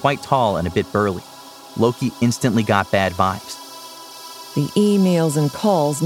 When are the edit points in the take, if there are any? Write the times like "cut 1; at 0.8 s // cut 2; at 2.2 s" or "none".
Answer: cut 1; at 4.0 s